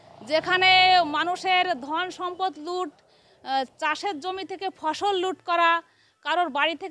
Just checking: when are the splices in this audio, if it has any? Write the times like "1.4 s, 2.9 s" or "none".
none